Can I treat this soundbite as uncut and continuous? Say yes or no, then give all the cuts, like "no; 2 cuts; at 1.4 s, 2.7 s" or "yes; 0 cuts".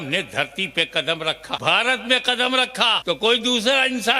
no; 2 cuts; at 1.6 s, 3.0 s